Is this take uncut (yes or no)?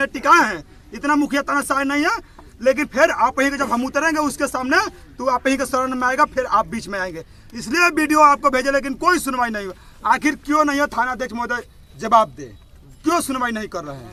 yes